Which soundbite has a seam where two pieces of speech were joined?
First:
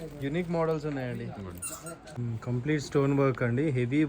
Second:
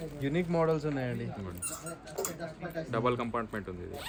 first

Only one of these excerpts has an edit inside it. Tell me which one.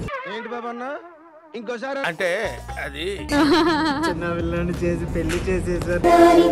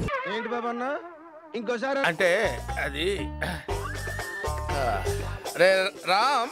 first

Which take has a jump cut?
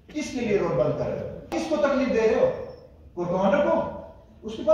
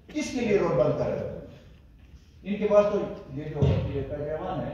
first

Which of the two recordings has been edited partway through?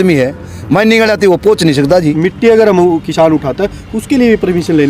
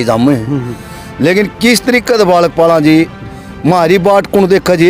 first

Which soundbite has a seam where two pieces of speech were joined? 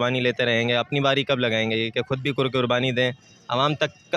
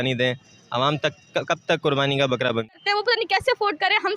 second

